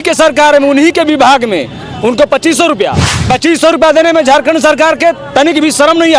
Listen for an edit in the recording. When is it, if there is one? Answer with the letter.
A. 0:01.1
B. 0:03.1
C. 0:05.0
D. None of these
B